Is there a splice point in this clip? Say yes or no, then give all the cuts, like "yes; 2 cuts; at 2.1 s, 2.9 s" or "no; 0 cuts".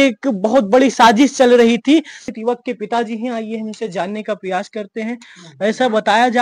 yes; 1 cut; at 2.3 s